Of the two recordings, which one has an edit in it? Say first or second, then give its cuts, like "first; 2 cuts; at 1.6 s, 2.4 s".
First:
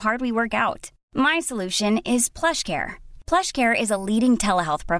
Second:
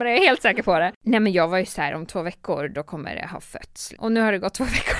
second; 2 cuts; at 1.0 s, 3.9 s